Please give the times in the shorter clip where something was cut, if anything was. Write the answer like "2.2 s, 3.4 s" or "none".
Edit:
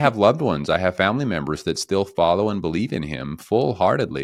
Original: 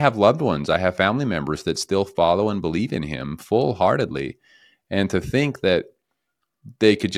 none